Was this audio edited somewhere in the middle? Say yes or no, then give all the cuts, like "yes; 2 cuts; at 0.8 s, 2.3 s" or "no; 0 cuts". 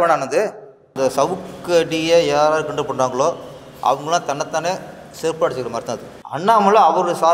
yes; 2 cuts; at 0.9 s, 6.1 s